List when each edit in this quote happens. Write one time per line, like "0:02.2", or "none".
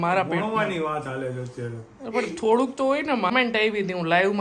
0:03.3